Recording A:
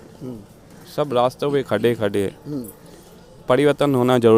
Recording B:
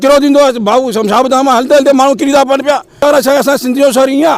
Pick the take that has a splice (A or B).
B